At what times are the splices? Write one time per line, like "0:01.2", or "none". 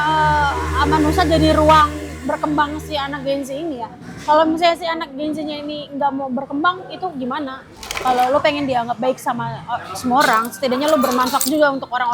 0:07.9